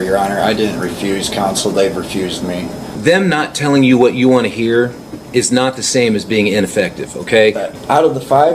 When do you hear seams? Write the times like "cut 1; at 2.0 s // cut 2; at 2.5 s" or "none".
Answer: cut 1; at 2.8 s // cut 2; at 7.7 s